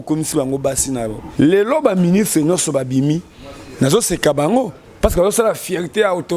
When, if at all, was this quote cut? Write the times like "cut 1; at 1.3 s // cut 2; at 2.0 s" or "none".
cut 1; at 1.2 s

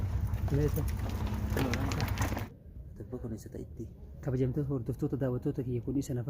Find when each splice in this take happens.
cut 1; at 2.6 s

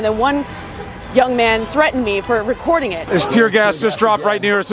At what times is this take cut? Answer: cut 1; at 3.0 s

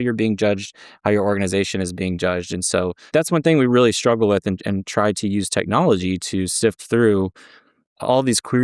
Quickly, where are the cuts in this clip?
cut 1; at 3.0 s

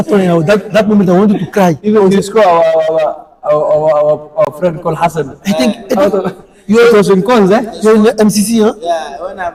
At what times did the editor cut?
none

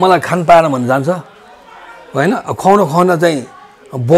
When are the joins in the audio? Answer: none

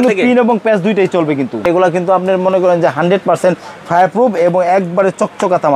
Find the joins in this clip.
cut 1; at 1.6 s

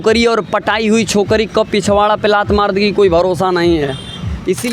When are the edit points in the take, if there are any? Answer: none

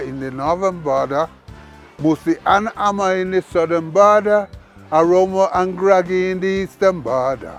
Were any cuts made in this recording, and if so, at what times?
none

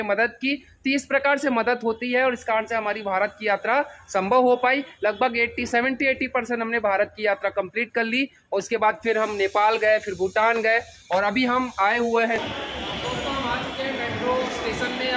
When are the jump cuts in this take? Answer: cut 1; at 12.4 s

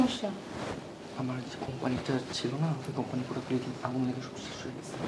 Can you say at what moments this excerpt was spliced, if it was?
none

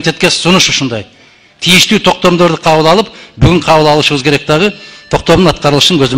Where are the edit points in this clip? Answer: none

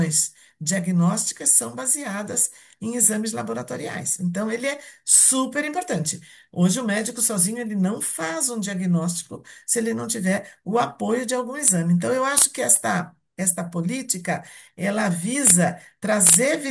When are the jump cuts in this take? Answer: none

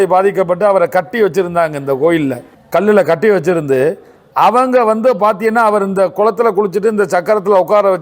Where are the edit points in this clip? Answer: cut 1; at 2.5 s

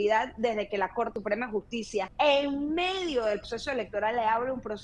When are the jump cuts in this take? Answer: cut 1; at 1.1 s // cut 2; at 2.1 s // cut 3; at 3.4 s

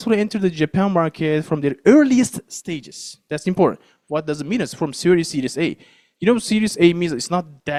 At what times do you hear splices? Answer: none

